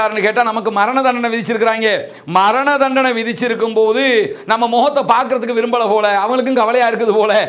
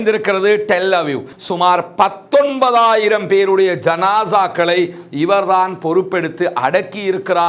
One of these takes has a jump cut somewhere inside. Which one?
second; 1 cut; at 1.3 s

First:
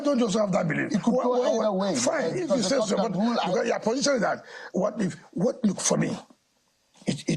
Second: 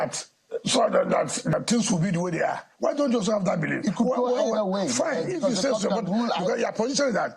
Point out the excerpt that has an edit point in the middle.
second; 1 cut; at 1.5 s

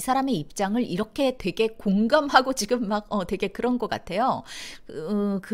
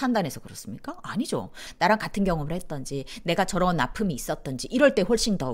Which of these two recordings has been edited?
second; 1 cut; at 1.6 s

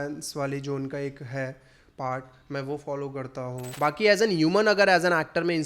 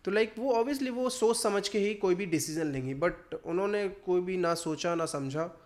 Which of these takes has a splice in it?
first; 1 cut; at 3.7 s

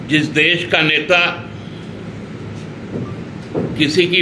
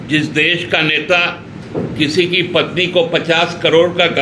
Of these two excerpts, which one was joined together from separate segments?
second; 1 cut; at 1.5 s

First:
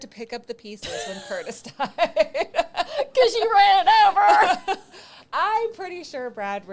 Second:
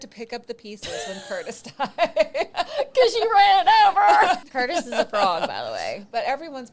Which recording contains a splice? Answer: second; 2 cuts; at 2.5 s, 4.4 s

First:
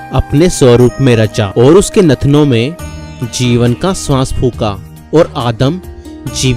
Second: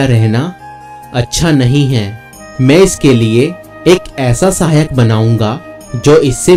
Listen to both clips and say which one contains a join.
first; 1 cut; at 1.5 s

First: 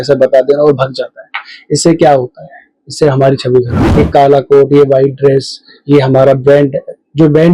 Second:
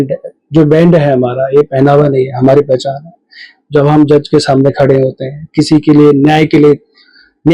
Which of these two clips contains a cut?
first; 1 cut; at 3.8 s

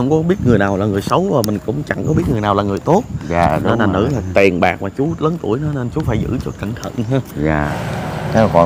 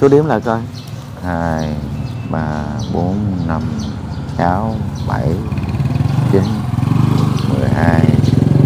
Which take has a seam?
first; 1 cut; at 7.7 s

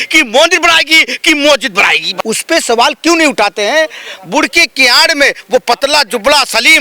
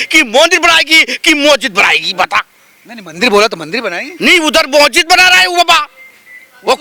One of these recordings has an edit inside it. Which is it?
first; 1 cut; at 2.1 s

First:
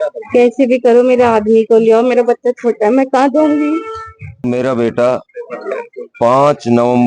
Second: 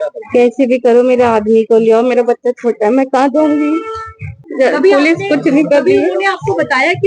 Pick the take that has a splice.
first; 1 cut; at 4.4 s

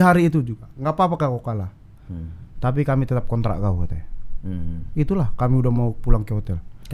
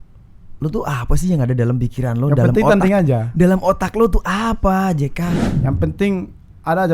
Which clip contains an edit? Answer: second; 1 cut; at 5.5 s

